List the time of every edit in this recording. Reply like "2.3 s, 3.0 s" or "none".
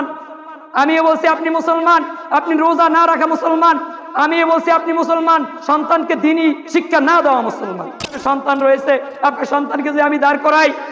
8.2 s